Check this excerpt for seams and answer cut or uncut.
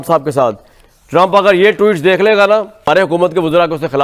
cut